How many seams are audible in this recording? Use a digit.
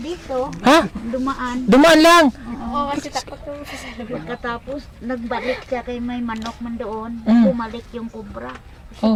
0